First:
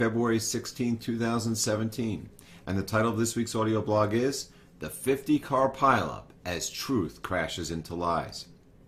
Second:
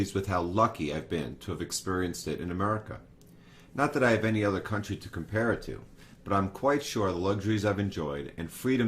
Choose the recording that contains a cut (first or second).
second